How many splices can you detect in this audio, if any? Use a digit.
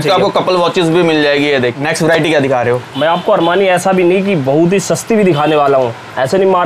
1